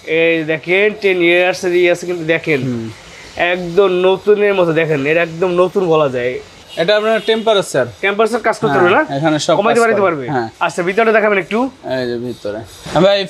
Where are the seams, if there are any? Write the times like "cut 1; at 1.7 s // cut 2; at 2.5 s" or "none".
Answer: none